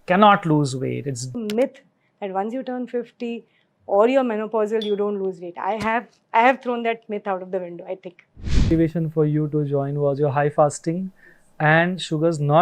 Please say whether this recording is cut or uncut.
cut